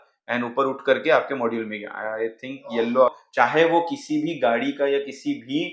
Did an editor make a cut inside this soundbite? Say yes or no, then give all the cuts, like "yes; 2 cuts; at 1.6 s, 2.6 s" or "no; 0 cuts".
yes; 1 cut; at 3.2 s